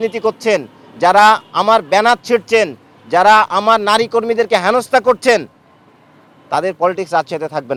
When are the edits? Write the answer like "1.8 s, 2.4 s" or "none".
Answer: none